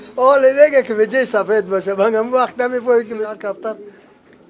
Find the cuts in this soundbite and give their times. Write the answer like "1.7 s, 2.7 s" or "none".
3.3 s